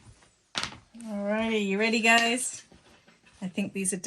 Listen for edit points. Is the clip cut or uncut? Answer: uncut